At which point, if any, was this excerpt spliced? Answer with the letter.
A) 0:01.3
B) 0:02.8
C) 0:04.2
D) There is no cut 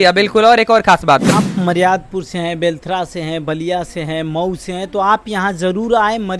A